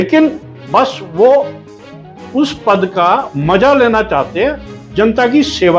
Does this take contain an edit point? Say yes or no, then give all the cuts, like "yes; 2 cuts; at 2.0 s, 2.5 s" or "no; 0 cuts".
no; 0 cuts